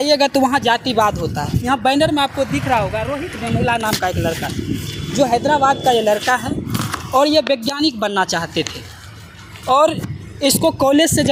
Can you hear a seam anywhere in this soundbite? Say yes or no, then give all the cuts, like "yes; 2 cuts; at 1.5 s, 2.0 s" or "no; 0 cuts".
no; 0 cuts